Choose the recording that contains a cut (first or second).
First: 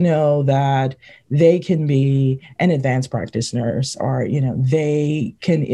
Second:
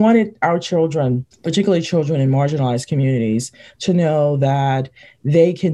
second